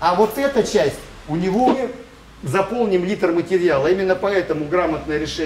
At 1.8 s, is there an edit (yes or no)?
yes